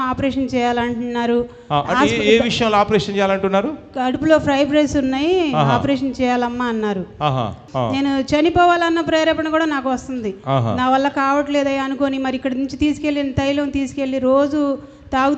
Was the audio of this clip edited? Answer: yes; 1 cut; at 7.6 s

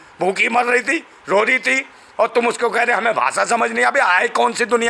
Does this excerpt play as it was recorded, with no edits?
yes; 0 cuts

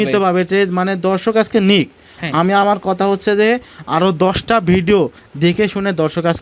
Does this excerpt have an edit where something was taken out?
no; 0 cuts

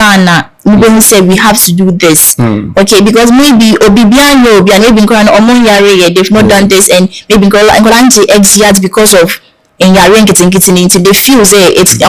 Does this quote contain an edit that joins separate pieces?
no; 0 cuts

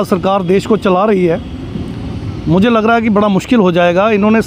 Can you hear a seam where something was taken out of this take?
no; 0 cuts

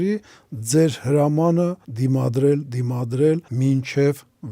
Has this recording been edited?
yes; 2 cuts; at 1.9 s, 3.5 s

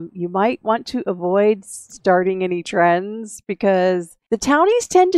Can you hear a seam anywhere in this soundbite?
yes; 1 cut; at 4.1 s

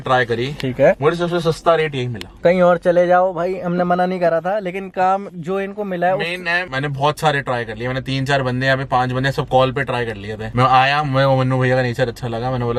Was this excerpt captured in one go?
yes; 0 cuts

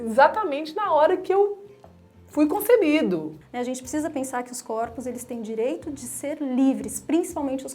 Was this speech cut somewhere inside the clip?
yes; 1 cut; at 3.4 s

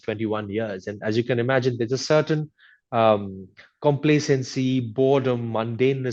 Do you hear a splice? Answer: no; 0 cuts

